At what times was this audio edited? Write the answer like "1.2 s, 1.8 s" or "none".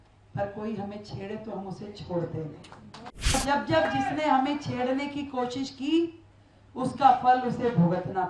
3.3 s